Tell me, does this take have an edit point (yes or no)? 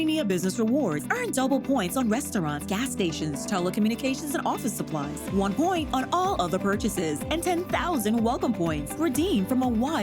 no